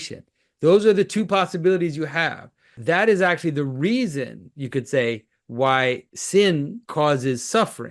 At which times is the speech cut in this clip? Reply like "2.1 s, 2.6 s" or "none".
2.7 s, 6.1 s, 6.8 s